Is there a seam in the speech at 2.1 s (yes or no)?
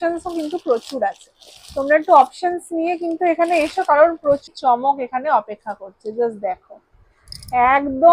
no